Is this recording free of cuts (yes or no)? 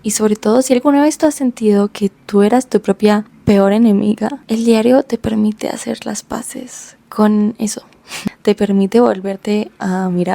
no